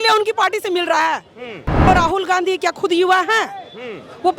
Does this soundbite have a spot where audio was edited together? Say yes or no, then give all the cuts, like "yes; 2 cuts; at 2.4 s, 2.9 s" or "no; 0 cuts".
yes; 1 cut; at 1.9 s